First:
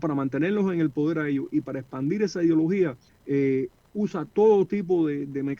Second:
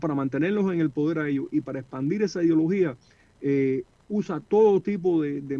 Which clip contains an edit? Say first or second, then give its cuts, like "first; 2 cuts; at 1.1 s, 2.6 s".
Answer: first; 1 cut; at 3.1 s